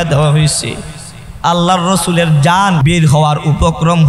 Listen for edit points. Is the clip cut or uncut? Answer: cut